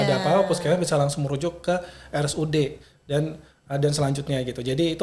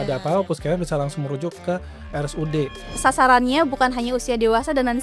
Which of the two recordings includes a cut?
second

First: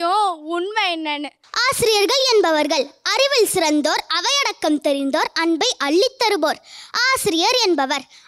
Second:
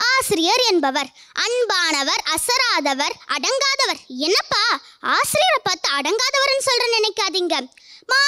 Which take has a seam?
first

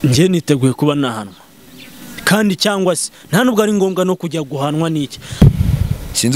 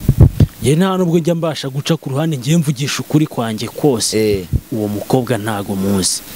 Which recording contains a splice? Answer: first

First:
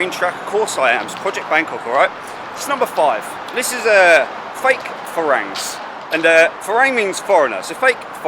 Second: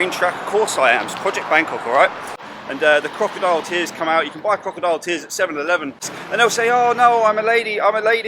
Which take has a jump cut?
second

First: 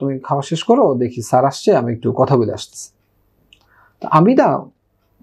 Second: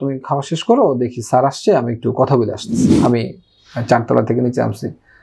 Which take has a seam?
second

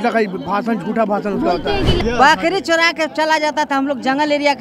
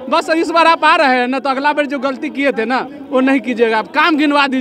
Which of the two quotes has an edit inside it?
first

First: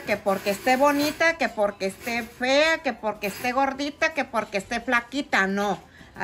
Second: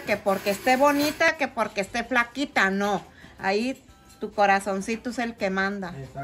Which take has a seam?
second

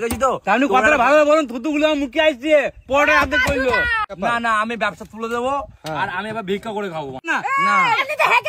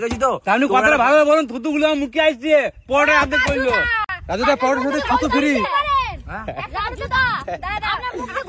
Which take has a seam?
first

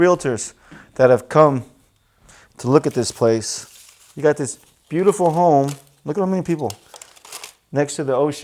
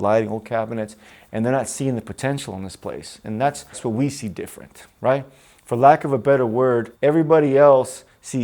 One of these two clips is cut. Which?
second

